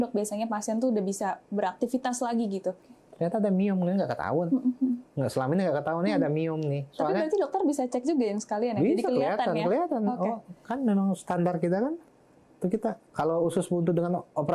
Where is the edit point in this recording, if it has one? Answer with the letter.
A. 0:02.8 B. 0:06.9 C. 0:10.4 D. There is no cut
A